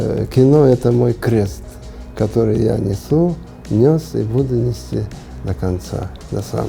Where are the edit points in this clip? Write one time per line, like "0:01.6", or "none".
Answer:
none